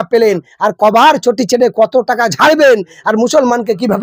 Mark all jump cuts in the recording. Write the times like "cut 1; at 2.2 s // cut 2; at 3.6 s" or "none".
none

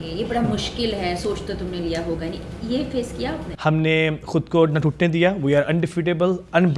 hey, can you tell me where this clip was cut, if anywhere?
cut 1; at 3.4 s

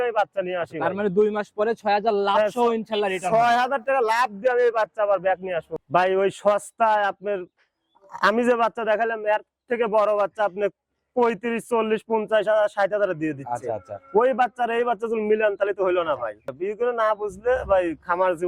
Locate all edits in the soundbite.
cut 1; at 5.7 s

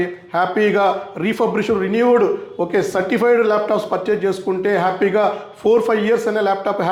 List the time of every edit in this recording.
none

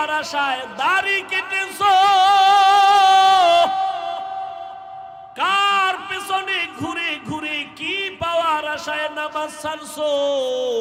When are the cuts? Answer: none

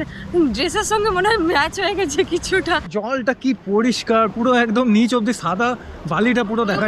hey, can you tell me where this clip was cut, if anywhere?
cut 1; at 2.8 s

